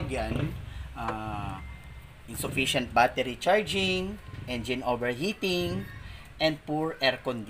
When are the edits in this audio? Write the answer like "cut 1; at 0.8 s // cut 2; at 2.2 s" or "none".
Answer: none